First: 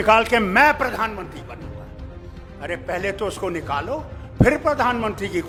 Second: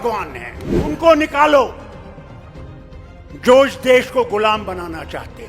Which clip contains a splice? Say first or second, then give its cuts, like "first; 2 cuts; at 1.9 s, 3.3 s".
second; 3 cuts; at 0.9 s, 1.8 s, 3.3 s